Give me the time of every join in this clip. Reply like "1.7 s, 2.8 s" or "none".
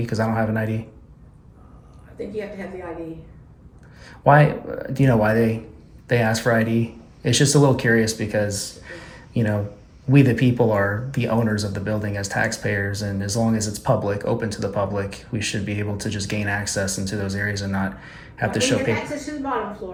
none